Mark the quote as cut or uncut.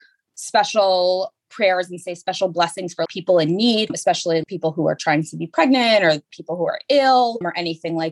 uncut